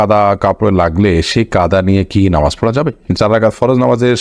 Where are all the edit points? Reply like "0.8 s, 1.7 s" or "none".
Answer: 3.1 s

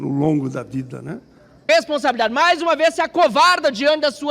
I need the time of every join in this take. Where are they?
1.5 s

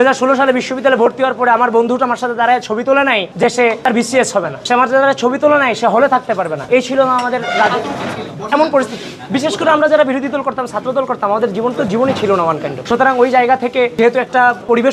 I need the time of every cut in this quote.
none

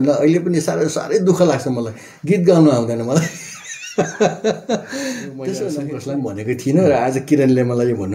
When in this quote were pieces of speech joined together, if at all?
5.9 s

